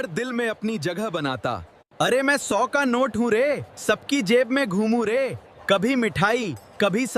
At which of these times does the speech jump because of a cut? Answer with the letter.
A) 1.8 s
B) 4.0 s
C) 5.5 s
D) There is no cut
A